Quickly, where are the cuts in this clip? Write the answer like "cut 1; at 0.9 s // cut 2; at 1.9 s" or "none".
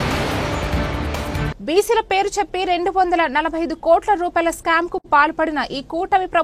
cut 1; at 1.4 s